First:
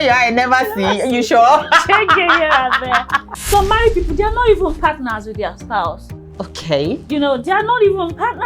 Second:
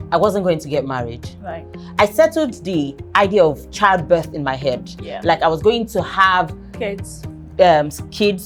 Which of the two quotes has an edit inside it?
first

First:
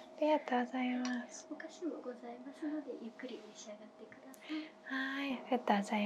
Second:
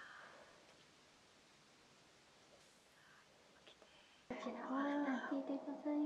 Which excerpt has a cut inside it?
second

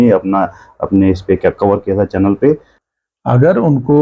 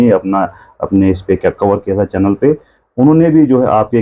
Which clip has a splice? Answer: first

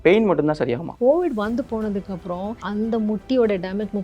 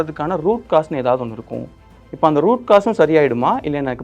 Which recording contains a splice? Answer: first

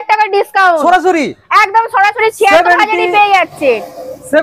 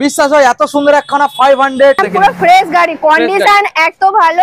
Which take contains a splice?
second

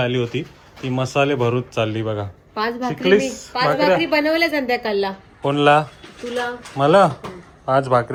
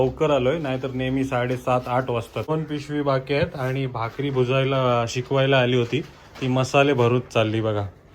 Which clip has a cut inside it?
second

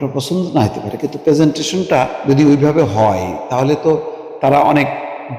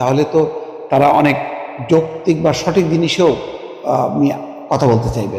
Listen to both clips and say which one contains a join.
first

